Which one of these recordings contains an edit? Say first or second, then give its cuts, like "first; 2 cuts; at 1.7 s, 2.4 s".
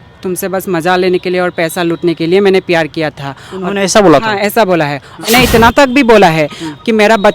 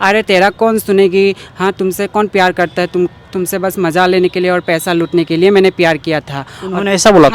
first; 1 cut; at 5.3 s